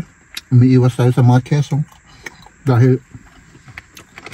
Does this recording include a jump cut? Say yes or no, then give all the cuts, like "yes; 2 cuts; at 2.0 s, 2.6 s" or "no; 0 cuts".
no; 0 cuts